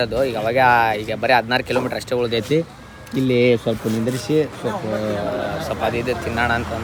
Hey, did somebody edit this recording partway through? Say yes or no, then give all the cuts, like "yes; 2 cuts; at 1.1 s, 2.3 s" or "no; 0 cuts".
no; 0 cuts